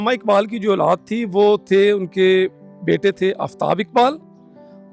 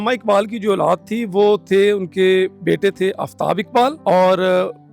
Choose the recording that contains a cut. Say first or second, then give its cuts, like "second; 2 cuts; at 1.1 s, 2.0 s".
second; 2 cuts; at 2.6 s, 4.0 s